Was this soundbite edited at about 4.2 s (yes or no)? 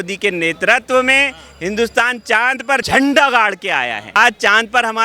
yes